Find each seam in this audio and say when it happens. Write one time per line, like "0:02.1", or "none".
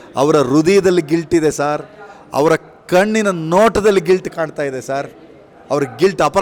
none